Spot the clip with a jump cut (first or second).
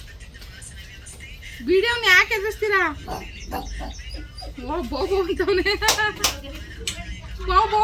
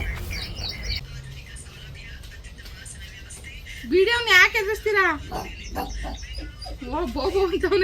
second